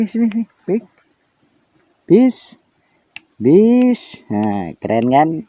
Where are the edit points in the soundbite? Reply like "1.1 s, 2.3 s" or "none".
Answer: none